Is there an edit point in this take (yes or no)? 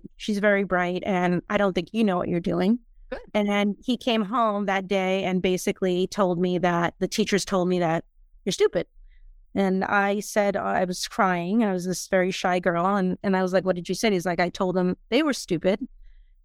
no